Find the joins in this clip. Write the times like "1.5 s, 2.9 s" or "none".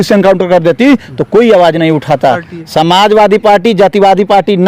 2.5 s